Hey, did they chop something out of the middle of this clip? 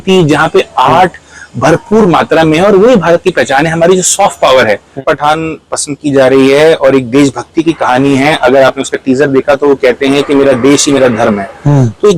yes; 1 cut; at 5.0 s

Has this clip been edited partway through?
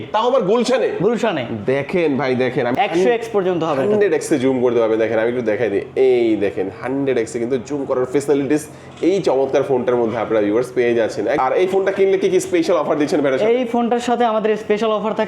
yes; 2 cuts; at 2.7 s, 11.4 s

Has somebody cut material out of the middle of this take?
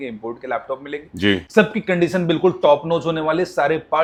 no; 0 cuts

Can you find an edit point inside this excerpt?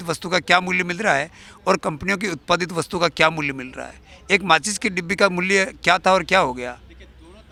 no; 0 cuts

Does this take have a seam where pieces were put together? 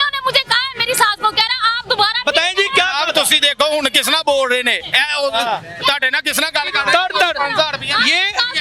no; 0 cuts

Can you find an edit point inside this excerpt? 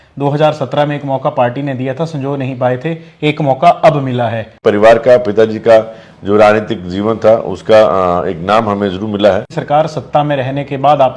yes; 2 cuts; at 4.5 s, 9.5 s

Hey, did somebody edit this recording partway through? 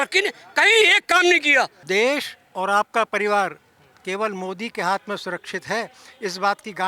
yes; 1 cut; at 1.8 s

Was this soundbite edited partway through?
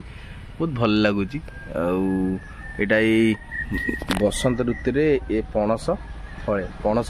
no; 0 cuts

